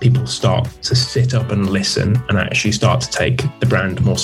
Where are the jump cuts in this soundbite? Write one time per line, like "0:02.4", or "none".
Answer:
none